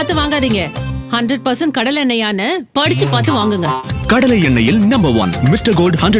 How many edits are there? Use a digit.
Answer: 0